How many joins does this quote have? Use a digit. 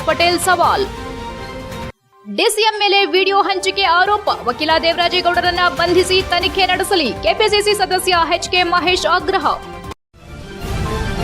1